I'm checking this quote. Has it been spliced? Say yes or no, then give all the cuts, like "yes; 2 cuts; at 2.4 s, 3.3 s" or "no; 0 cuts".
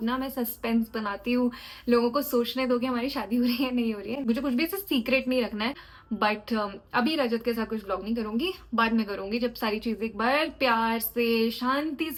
no; 0 cuts